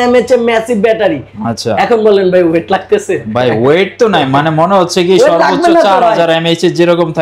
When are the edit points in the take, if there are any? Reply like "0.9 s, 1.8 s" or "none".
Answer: none